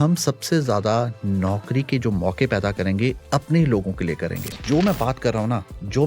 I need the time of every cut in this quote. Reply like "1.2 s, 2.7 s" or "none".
4.6 s